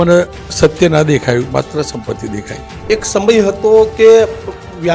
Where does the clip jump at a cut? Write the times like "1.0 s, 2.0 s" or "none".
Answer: 2.8 s